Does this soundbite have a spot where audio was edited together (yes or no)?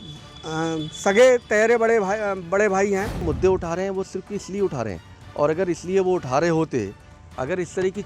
yes